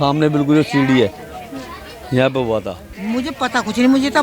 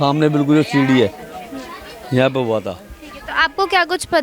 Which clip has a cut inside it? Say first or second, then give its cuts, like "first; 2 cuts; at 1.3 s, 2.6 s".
first; 1 cut; at 2.8 s